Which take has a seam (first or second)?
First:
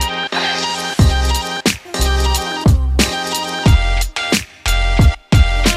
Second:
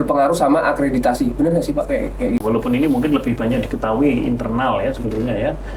second